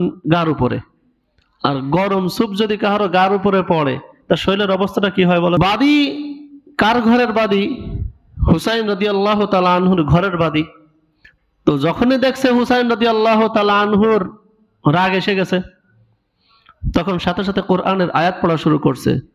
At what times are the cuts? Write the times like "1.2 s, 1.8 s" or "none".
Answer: 5.6 s